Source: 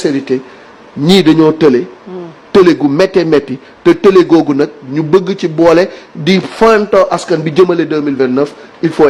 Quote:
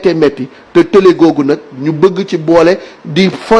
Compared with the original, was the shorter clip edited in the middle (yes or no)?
no